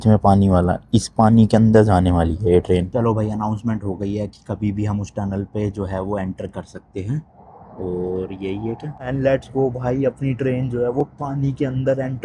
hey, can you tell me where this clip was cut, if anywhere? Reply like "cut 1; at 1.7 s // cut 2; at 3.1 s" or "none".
cut 1; at 2.9 s // cut 2; at 9.0 s